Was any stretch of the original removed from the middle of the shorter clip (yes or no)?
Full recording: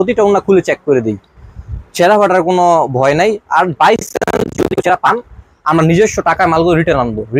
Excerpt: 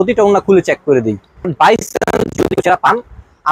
yes